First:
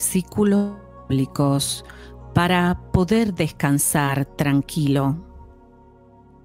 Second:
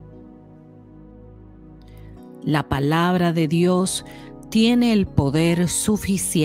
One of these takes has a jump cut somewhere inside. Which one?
second; 1 cut; at 2.4 s

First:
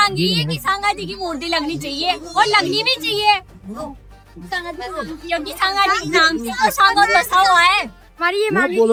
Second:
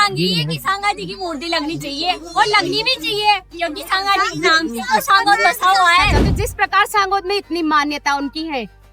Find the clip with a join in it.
second; 2 cuts; at 3.5 s, 6.2 s

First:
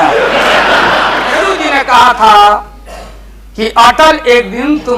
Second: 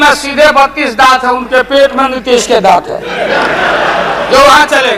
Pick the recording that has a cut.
first; 1 cut; at 1.5 s

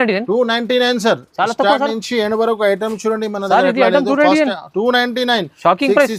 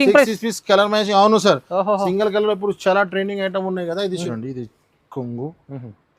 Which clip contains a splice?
second; 1 cut; at 4.3 s

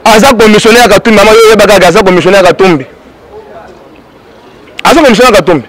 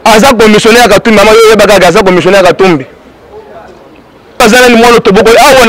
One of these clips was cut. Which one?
second; 1 cut; at 4.4 s

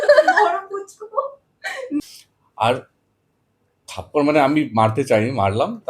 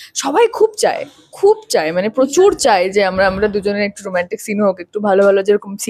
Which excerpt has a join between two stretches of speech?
first; 1 cut; at 2.0 s

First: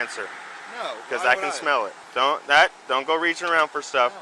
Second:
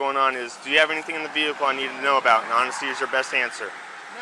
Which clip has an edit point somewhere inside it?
first; 1 cut; at 2.0 s

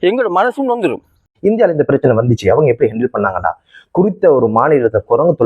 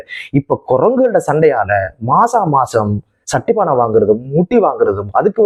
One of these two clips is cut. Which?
first; 1 cut; at 1.3 s

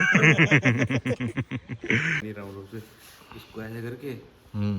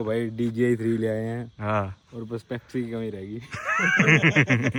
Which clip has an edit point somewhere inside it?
first; 1 cut; at 2.2 s

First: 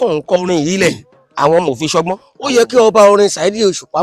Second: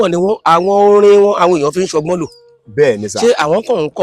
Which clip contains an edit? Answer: first; 1 cut; at 2.2 s

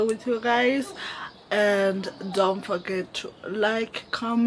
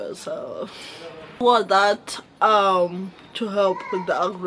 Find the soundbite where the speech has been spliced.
second; 1 cut; at 1.4 s

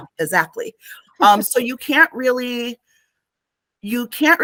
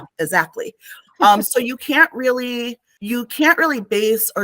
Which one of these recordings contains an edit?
second; 1 cut; at 2.9 s

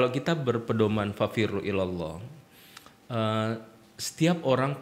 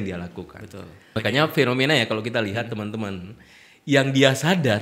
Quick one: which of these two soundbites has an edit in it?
second; 1 cut; at 1.2 s

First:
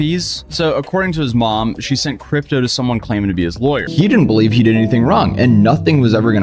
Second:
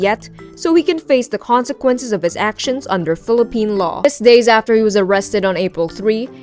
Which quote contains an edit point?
first; 1 cut; at 3.9 s

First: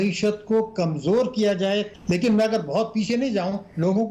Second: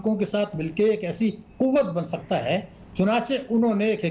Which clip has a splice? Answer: first; 1 cut; at 1.9 s

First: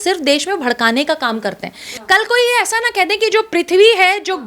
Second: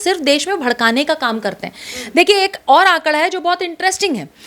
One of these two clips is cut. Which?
first; 1 cut; at 1.9 s

